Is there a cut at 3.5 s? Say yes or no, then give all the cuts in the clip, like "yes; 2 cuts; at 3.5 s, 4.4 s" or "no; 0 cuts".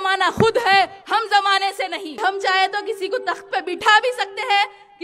no; 1 cut; at 2.2 s